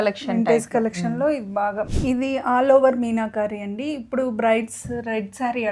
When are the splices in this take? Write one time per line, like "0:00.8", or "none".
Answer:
0:01.9